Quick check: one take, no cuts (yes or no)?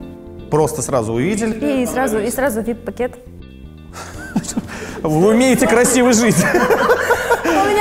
yes